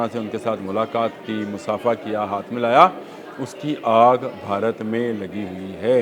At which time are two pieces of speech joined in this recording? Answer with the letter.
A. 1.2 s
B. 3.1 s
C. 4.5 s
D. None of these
D